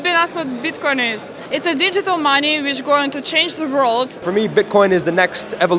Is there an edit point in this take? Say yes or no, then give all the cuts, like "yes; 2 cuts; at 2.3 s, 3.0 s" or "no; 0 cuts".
yes; 2 cuts; at 1.3 s, 4.3 s